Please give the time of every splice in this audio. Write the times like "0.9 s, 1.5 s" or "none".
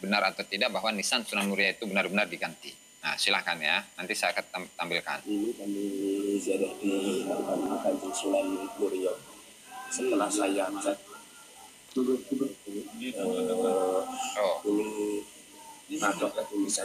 none